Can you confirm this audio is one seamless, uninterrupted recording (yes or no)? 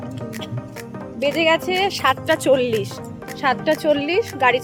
yes